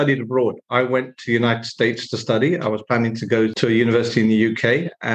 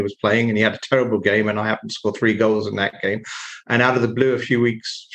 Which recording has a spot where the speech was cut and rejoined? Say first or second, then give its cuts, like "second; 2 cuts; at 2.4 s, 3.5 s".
first; 1 cut; at 3.6 s